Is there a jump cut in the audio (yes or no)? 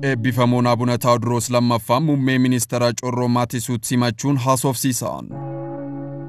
yes